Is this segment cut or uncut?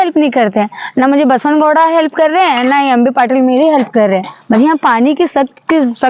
uncut